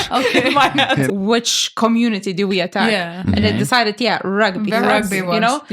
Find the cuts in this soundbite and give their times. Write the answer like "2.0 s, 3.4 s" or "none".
1.1 s